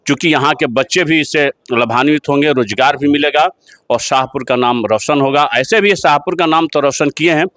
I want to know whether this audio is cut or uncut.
uncut